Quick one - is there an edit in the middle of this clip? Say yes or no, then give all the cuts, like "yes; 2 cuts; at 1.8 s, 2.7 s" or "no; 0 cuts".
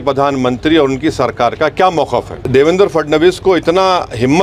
yes; 1 cut; at 2.4 s